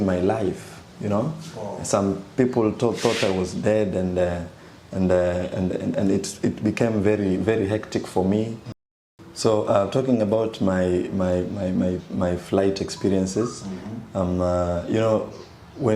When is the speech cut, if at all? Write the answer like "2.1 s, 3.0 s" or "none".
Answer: 8.6 s

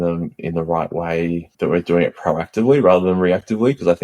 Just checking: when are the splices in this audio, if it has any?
1.5 s

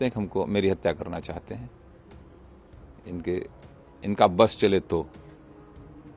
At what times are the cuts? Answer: none

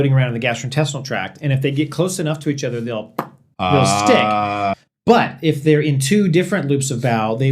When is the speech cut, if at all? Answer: 4.7 s

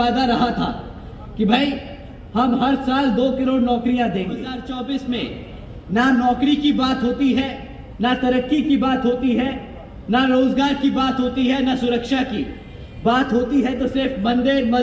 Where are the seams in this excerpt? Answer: 4.6 s

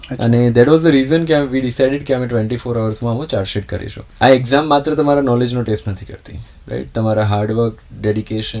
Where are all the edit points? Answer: 4.0 s

